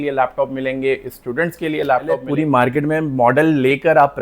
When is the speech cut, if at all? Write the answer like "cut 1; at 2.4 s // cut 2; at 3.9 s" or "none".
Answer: cut 1; at 2.3 s

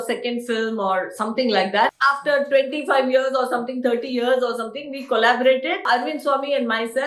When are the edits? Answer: cut 1; at 1.9 s // cut 2; at 5.8 s

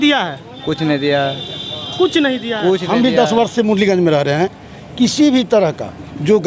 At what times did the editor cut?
cut 1; at 2.9 s

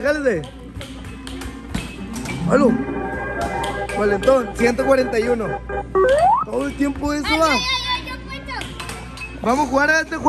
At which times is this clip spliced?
none

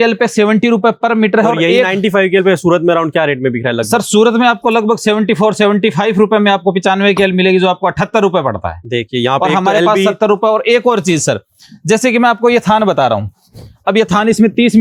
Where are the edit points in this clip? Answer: none

